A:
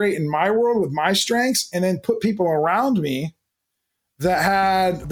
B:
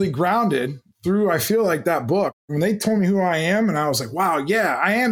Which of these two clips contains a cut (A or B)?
B